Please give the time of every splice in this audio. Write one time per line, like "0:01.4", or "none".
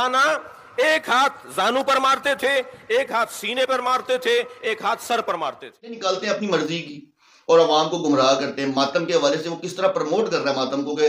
0:06.0